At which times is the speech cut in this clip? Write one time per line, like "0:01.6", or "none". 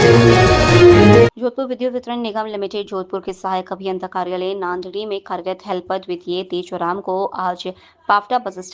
0:01.3